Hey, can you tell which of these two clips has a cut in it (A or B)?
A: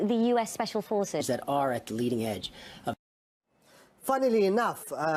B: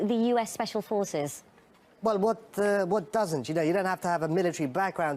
B